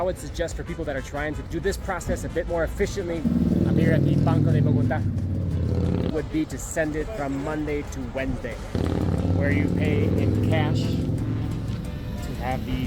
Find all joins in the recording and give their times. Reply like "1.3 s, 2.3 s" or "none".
3.2 s, 6.1 s, 8.7 s